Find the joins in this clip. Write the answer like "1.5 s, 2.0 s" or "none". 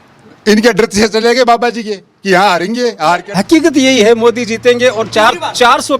3.3 s

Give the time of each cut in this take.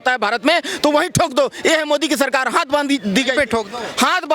none

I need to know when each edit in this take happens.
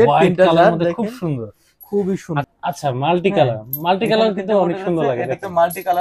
2.4 s

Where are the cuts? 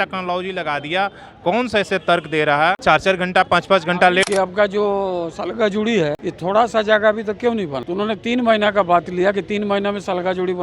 2.8 s, 4.3 s, 6.3 s, 7.8 s

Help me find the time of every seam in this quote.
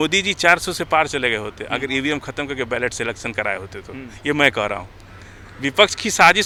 none

